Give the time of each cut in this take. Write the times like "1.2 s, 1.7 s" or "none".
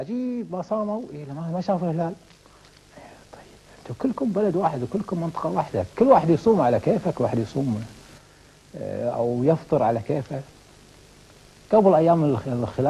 none